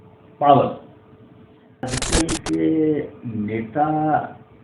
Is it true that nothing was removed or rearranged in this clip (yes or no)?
no